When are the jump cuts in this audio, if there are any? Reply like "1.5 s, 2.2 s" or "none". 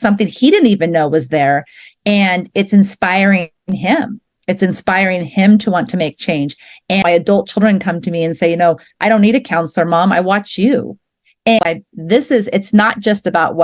7.0 s, 11.6 s